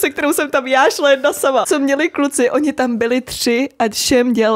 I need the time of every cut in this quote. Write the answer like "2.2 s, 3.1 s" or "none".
1.7 s